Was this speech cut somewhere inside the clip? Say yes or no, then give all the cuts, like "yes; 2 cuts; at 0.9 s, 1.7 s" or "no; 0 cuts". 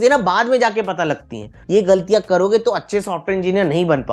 yes; 1 cut; at 1.5 s